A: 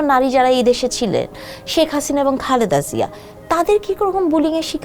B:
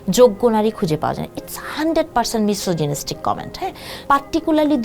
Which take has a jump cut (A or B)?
B